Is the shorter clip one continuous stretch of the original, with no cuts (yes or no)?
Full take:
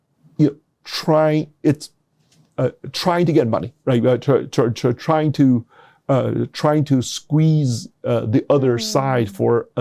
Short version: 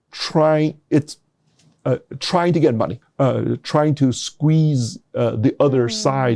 no